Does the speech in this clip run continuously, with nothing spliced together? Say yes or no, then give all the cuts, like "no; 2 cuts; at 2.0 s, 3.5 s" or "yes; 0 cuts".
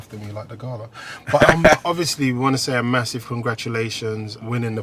no; 1 cut; at 1.8 s